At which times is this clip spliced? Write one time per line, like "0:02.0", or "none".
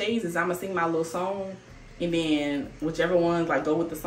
none